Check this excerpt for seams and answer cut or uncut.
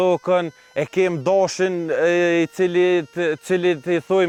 uncut